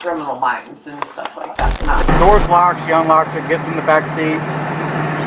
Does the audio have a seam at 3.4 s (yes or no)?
no